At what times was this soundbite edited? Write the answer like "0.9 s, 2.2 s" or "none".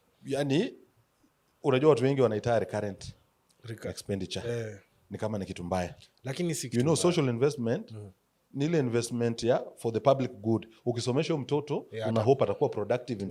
none